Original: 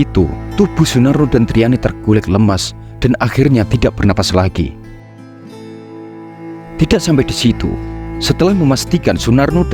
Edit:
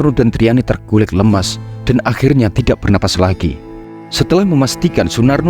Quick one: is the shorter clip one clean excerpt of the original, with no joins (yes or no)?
no